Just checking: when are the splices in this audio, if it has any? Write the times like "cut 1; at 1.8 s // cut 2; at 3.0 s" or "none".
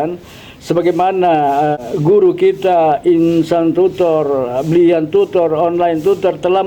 cut 1; at 1.8 s